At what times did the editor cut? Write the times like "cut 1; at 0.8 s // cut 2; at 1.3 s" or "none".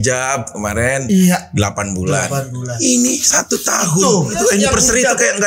cut 1; at 4.3 s

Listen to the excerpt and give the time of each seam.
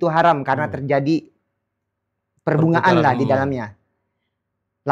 none

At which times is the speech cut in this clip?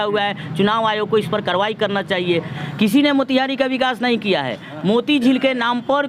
cut 1; at 2.7 s

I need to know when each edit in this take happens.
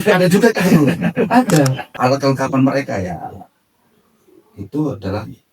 cut 1; at 1.8 s

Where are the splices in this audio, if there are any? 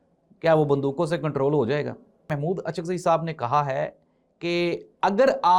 cut 1; at 2.3 s

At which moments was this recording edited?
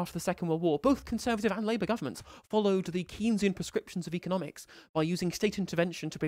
none

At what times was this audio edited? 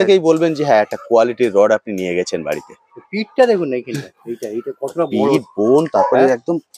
none

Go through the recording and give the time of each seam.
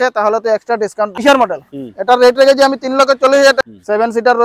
cut 1; at 1.1 s // cut 2; at 3.6 s

